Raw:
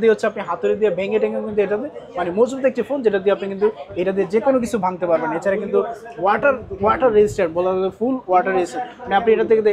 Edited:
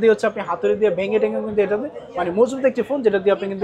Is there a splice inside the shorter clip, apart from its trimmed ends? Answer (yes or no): no